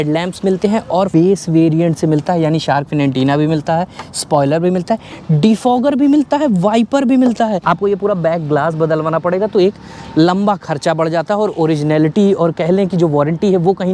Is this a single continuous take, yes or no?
no